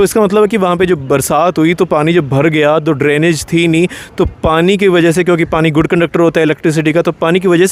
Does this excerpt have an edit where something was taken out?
no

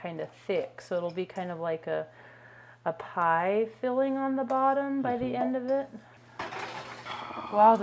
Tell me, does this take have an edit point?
yes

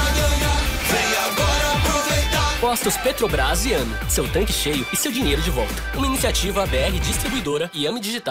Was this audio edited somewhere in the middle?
no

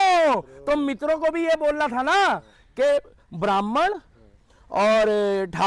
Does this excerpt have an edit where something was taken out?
no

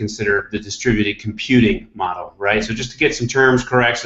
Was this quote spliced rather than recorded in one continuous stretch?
yes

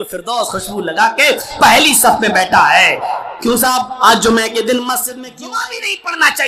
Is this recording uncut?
no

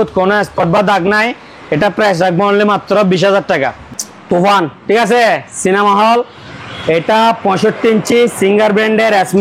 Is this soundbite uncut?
no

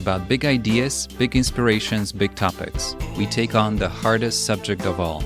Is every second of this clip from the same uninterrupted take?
yes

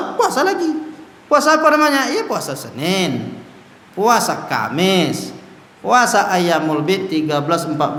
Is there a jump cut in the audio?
no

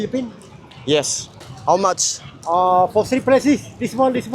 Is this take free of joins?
no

